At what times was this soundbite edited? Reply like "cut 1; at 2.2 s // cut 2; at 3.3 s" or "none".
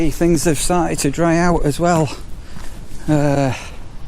none